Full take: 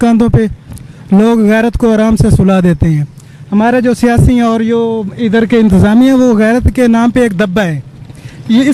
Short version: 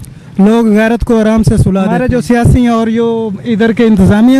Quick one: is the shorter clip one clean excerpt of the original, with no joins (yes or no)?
no